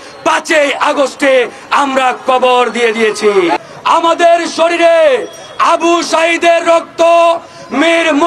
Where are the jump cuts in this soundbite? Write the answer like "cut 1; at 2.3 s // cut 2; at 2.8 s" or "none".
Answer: cut 1; at 3.6 s